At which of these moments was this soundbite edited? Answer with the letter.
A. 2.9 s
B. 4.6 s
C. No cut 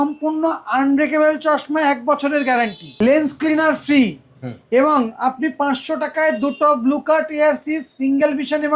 A